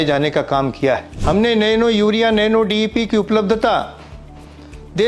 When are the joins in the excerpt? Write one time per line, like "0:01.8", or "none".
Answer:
0:01.1